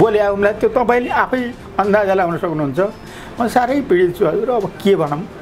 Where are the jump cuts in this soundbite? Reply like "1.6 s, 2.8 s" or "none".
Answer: none